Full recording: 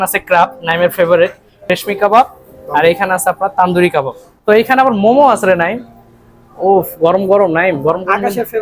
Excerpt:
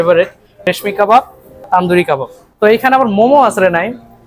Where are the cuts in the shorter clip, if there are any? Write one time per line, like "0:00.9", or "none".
0:01.7